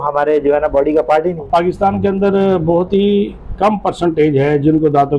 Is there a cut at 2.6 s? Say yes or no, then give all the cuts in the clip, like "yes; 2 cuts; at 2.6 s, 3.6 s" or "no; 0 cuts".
no; 1 cut; at 1.4 s